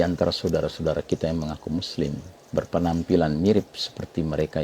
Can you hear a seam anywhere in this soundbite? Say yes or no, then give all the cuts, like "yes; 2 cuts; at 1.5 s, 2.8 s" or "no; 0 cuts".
yes; 1 cut; at 2.3 s